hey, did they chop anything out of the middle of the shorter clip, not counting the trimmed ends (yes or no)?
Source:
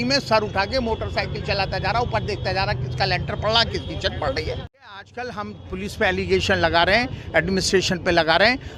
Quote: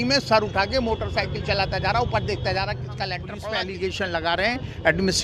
yes